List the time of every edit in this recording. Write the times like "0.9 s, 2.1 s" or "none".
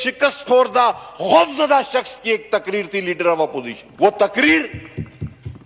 3.8 s